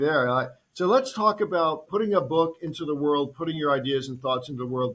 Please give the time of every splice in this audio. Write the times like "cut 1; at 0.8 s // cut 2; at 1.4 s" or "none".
cut 1; at 1.9 s